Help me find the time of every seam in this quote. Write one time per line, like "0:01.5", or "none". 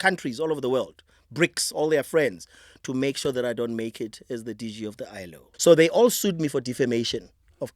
0:05.5